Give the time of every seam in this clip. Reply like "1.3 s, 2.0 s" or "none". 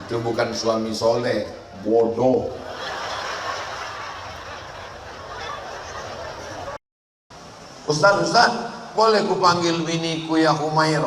6.8 s